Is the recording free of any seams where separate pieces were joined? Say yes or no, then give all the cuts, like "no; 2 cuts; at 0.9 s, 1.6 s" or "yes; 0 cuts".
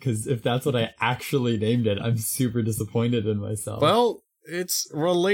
no; 1 cut; at 3.6 s